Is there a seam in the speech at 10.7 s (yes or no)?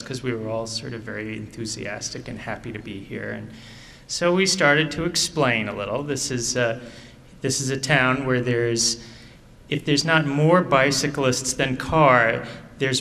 no